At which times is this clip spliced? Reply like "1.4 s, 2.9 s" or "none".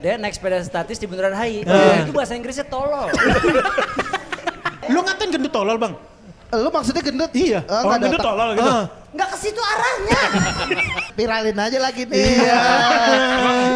4.9 s, 11.1 s